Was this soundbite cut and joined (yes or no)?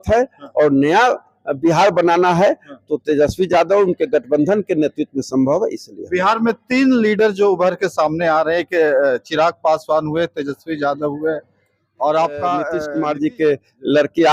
yes